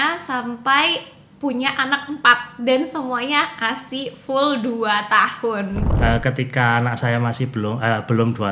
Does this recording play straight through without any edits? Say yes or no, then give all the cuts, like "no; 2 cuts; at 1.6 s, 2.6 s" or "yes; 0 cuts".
no; 1 cut; at 5.9 s